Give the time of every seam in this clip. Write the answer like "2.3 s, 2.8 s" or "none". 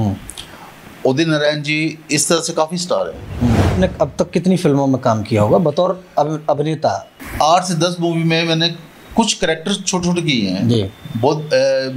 3.7 s, 7.1 s